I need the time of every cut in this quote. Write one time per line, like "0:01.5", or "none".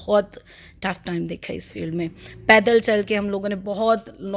none